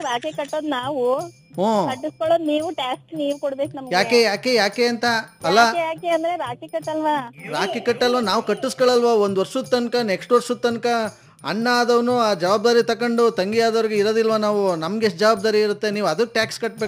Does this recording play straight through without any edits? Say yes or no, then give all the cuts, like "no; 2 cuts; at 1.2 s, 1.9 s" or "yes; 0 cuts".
yes; 0 cuts